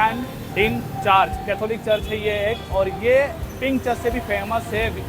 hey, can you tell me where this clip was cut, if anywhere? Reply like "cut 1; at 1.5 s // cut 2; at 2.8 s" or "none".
cut 1; at 3.4 s